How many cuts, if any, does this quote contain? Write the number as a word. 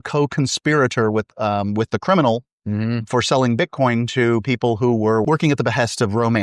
one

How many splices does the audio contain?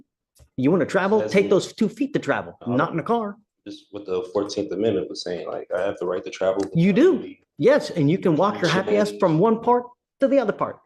zero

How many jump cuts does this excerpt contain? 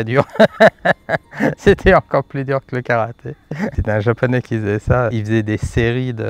two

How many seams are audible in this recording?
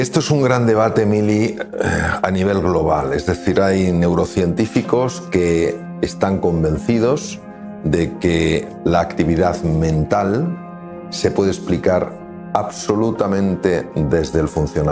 zero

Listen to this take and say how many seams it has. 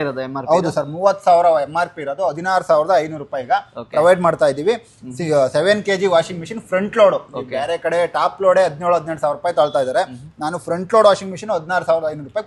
zero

